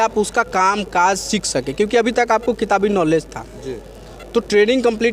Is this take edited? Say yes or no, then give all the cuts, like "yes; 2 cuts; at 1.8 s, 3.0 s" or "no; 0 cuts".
no; 0 cuts